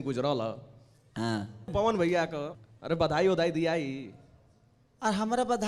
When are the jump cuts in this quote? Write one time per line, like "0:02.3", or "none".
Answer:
0:01.7
0:02.5